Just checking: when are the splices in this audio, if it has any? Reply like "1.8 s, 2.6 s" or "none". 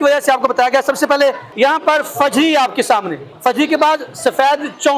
1.5 s, 3.2 s